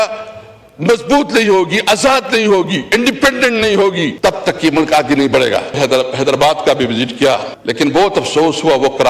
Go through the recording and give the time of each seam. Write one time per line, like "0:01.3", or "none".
0:04.1
0:05.8
0:07.5